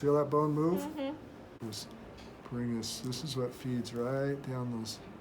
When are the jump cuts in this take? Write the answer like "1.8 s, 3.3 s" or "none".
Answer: 1.5 s